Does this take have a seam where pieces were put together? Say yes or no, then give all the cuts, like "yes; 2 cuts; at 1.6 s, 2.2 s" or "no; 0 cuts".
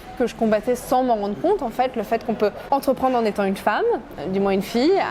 yes; 1 cut; at 2.6 s